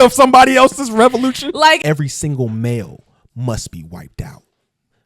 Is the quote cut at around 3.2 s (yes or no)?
no